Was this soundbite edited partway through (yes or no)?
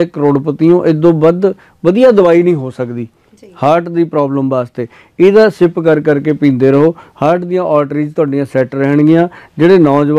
no